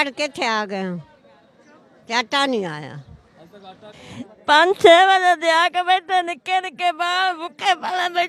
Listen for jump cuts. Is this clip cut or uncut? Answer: cut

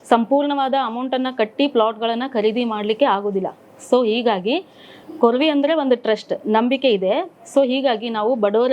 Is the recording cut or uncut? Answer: uncut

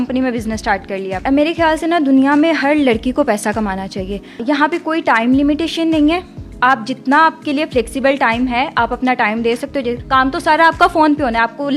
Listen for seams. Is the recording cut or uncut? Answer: cut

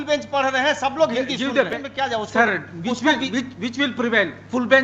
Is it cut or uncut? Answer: cut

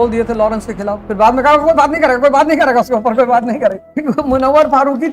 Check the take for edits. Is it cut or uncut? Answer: cut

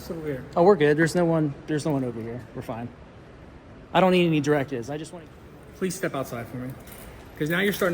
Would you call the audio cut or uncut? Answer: cut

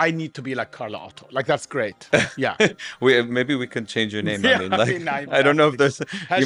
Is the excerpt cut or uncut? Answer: uncut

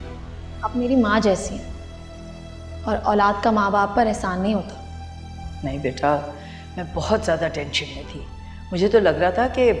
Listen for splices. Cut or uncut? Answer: uncut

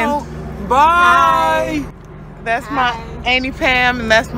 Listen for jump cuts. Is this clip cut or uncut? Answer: uncut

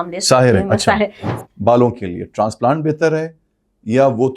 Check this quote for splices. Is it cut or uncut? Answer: cut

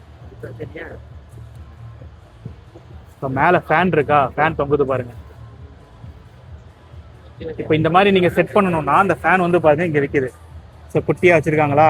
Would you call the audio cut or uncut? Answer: uncut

